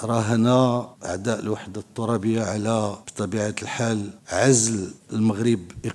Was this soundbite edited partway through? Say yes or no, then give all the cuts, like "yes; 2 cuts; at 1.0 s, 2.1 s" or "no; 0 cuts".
yes; 4 cuts; at 1.0 s, 3.0 s, 4.2 s, 5.0 s